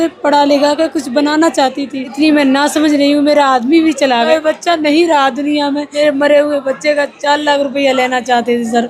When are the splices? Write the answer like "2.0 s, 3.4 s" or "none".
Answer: 2.1 s, 4.3 s, 5.9 s

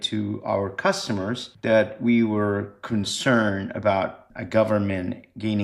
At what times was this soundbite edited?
1.5 s, 4.2 s

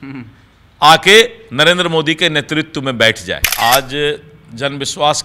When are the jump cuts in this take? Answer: 3.5 s

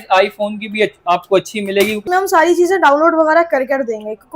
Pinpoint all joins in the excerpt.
2.0 s

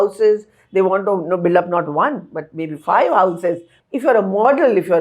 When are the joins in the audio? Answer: 3.7 s

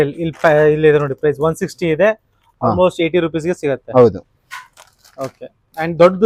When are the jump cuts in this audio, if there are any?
none

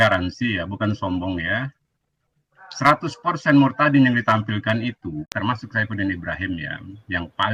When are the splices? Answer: 5.3 s

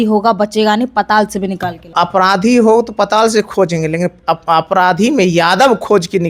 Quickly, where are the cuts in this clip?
1.9 s

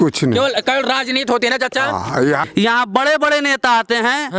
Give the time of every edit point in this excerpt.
2.5 s

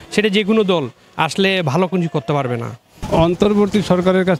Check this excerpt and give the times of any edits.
3.0 s

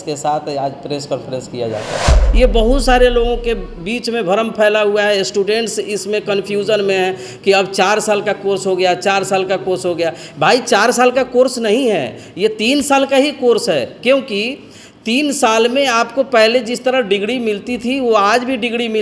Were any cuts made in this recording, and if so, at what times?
2.2 s

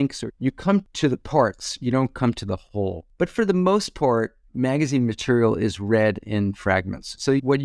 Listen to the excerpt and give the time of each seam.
0.9 s, 3.0 s

